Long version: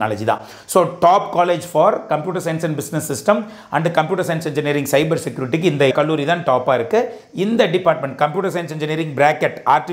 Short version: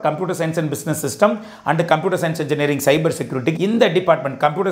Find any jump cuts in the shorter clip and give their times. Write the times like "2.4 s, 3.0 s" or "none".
3.5 s

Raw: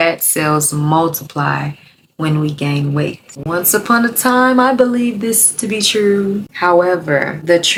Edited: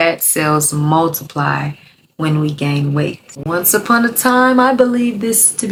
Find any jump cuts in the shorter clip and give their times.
none

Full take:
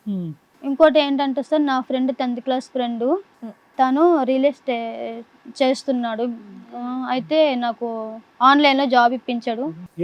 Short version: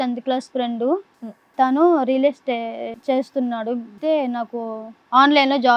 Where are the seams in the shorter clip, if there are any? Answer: 2.9 s, 4.0 s

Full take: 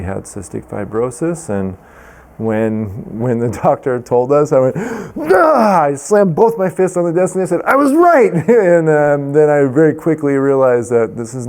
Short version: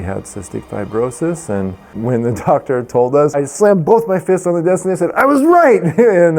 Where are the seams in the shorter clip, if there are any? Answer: 1.9 s, 3.3 s

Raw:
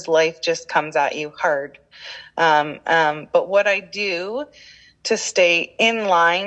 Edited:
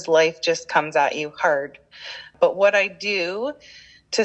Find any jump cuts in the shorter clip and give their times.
2.3 s

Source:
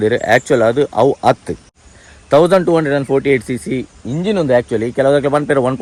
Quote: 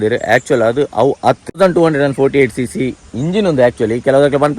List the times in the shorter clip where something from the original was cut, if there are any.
1.6 s

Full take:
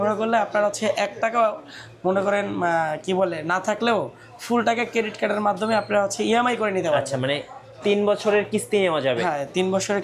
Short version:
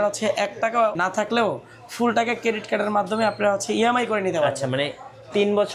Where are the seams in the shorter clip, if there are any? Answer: 1.0 s

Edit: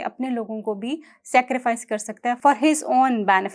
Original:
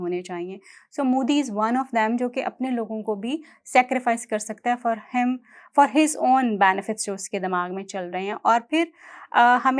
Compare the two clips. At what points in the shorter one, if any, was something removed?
2.4 s

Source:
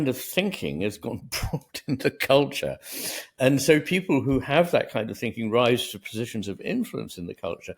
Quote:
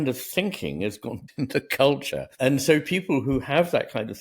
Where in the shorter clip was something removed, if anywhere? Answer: 1.2 s, 2.2 s

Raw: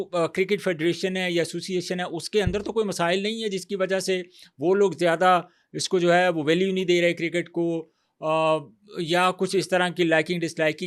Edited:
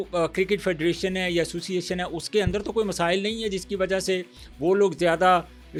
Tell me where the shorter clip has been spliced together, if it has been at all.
none

